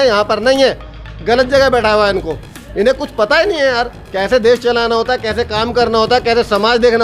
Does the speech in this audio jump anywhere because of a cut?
no; 0 cuts

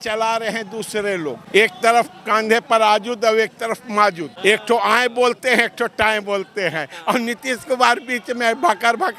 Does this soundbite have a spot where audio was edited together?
yes; 2 cuts; at 1.4 s, 4.3 s

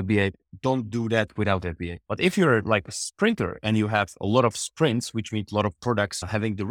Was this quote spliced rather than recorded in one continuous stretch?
yes; 1 cut; at 1.9 s

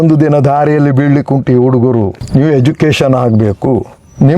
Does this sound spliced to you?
yes; 1 cut; at 2.2 s

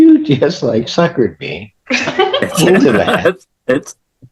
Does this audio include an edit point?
no; 0 cuts

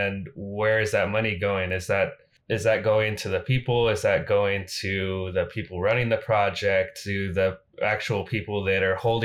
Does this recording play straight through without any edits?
no; 1 cut; at 2.3 s

